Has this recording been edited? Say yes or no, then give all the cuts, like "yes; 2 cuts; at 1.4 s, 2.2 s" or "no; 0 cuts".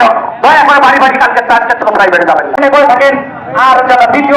yes; 1 cut; at 2.8 s